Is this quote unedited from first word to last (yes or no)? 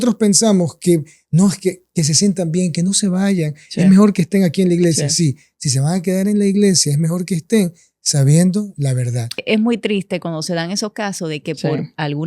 no